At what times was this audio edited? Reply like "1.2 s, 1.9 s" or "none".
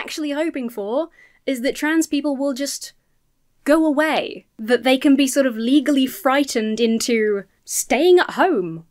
none